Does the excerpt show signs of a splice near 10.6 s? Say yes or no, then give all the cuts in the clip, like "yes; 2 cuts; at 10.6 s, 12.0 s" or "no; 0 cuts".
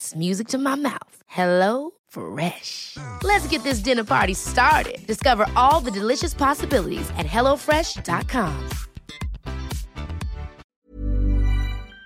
yes; 1 cut; at 10.6 s